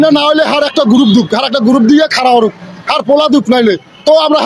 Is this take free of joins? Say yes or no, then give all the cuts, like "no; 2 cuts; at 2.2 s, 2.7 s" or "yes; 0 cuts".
yes; 0 cuts